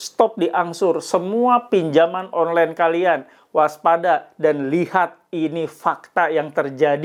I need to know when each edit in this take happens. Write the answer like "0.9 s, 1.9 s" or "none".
none